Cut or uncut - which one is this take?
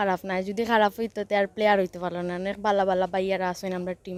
uncut